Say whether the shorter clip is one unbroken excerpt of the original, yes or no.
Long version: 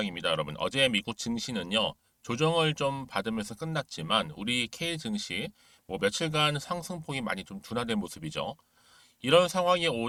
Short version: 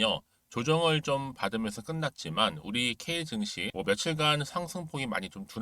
no